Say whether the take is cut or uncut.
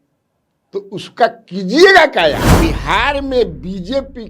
cut